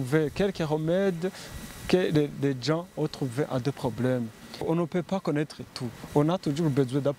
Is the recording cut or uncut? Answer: cut